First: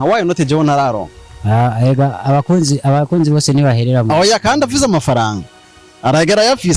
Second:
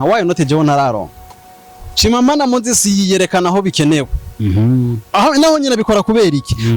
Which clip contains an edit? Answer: second; 1 cut; at 1.3 s

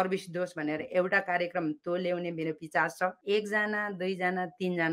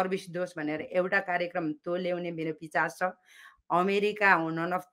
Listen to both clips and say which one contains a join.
first; 1 cut; at 3.2 s

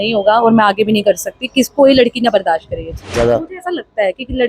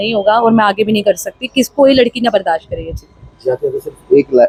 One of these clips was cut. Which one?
first; 1 cut; at 3.1 s

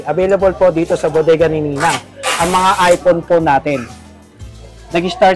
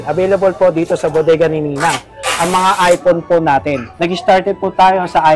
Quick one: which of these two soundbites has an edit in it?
second; 1 cut; at 3.9 s

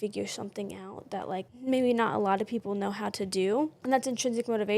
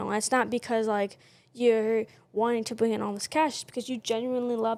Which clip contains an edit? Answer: first; 2 cuts; at 1.5 s, 3.8 s

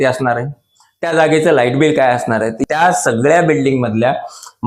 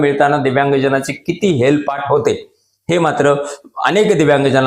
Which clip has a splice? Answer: first; 1 cut; at 2.6 s

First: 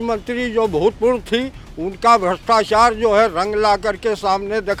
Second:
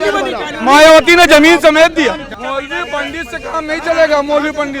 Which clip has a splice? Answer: second; 1 cut; at 2.3 s

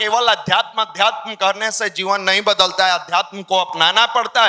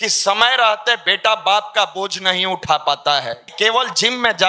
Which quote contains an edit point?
second; 1 cut; at 3.5 s

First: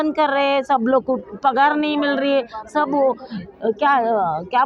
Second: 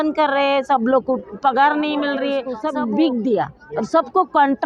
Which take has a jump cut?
second; 1 cut; at 2.5 s

